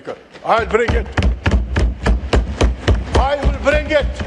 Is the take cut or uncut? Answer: uncut